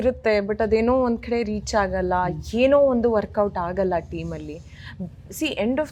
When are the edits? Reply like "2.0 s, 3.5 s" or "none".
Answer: none